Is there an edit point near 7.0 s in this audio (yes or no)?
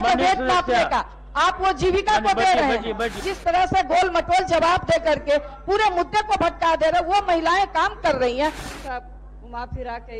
no